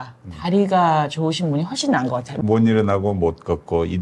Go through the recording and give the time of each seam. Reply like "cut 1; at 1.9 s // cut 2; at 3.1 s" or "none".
cut 1; at 2.3 s